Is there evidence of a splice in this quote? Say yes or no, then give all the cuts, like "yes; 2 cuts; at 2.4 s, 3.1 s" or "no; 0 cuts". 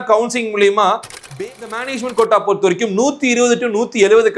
yes; 1 cut; at 1.3 s